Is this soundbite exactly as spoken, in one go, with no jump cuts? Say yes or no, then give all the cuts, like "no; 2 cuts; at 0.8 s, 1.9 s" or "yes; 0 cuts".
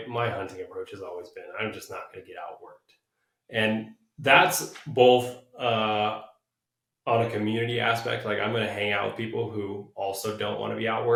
yes; 0 cuts